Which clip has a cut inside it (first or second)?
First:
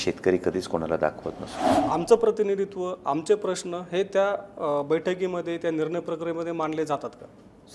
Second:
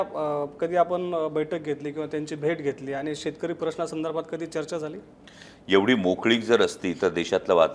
first